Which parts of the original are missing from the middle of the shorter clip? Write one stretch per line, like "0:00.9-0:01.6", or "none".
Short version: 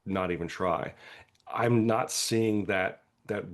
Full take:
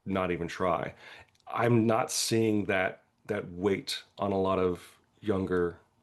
none